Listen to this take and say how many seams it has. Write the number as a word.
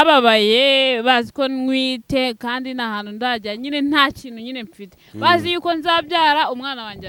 zero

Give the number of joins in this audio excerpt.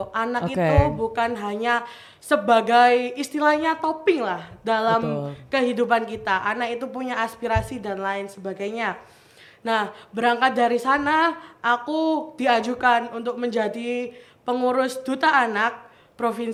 zero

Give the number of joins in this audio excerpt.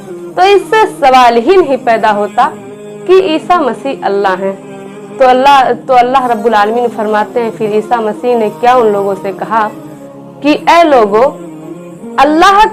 zero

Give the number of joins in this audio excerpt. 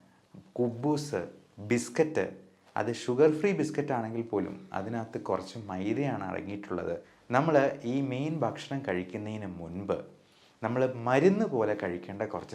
one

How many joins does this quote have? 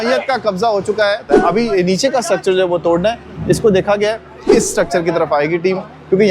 two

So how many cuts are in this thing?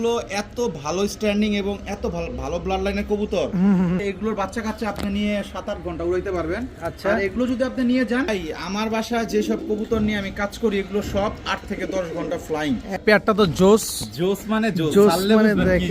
three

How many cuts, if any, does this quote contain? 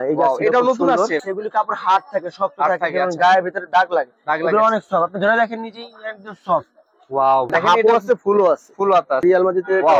three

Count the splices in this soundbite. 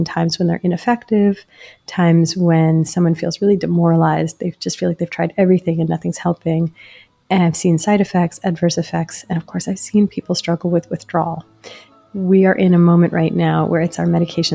one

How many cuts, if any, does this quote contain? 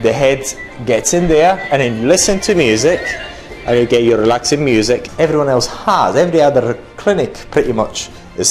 one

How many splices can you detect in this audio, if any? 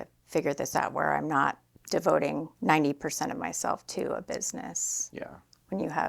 two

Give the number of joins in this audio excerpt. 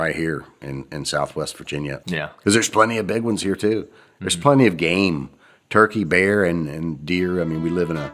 one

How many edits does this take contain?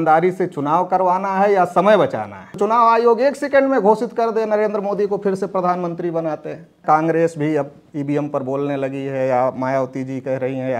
two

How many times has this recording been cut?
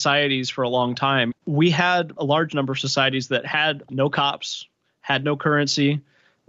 three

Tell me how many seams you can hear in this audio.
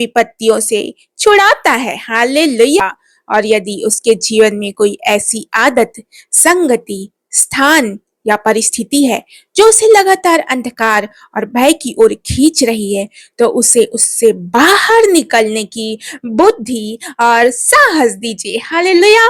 one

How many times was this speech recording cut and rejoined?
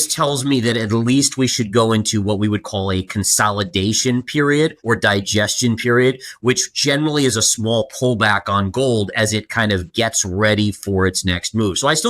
one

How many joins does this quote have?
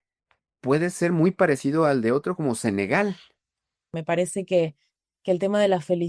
one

